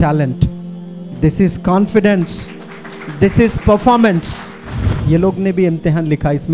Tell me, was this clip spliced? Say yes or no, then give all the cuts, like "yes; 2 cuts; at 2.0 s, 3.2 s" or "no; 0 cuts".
yes; 1 cut; at 5.0 s